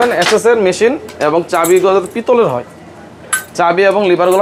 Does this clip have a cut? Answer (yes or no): no